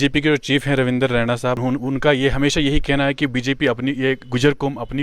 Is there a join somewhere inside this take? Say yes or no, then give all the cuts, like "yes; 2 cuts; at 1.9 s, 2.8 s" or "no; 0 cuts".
yes; 1 cut; at 1.6 s